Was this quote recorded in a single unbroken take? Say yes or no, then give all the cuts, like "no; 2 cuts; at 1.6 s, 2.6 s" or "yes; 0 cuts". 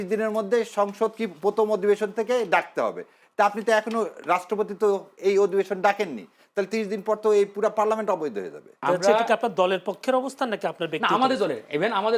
no; 1 cut; at 8.8 s